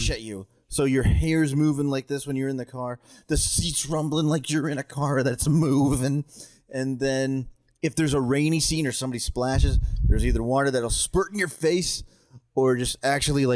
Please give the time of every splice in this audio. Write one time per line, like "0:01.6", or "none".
none